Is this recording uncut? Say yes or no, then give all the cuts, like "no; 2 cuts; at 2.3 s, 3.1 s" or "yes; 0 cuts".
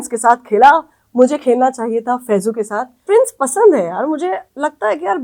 no; 1 cut; at 2.9 s